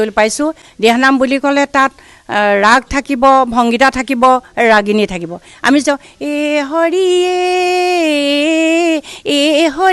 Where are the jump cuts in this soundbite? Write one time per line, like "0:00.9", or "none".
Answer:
none